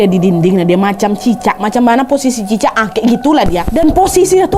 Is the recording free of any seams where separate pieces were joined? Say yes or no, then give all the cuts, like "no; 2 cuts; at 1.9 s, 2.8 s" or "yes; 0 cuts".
no; 1 cut; at 3.7 s